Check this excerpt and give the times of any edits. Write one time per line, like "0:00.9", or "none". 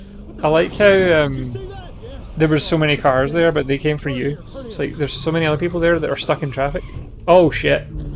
none

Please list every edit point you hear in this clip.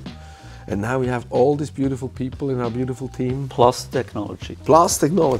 none

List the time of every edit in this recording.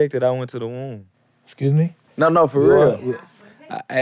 0:02.0

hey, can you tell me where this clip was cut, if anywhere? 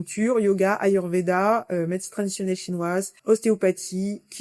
0:03.1

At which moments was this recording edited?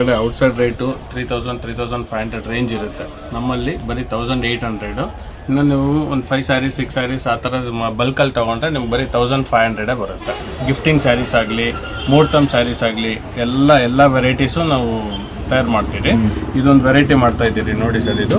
0:10.5

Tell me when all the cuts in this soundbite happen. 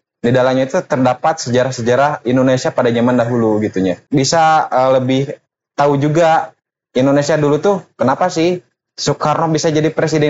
0:04.0

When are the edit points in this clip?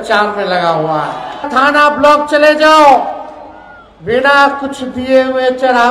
0:01.5

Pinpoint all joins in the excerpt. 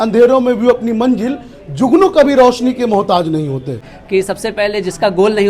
0:03.8

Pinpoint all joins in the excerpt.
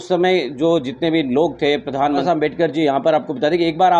0:02.2

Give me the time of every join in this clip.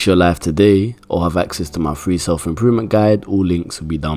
none

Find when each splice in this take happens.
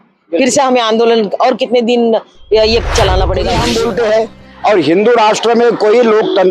0:03.6

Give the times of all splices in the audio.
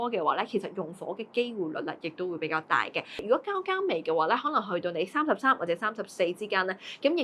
0:03.2

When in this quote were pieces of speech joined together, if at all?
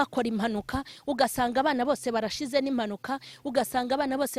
none

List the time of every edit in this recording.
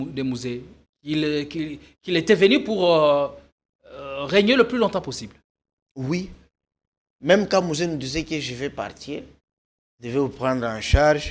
none

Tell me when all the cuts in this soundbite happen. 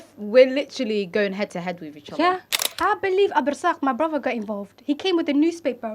0:02.6

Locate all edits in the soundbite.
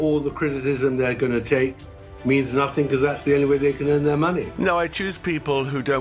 0:04.6

